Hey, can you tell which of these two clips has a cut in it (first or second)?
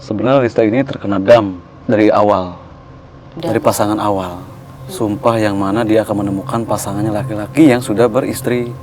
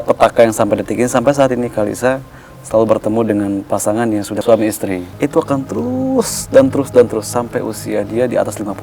second